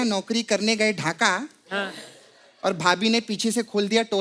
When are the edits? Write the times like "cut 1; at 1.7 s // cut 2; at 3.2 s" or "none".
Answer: none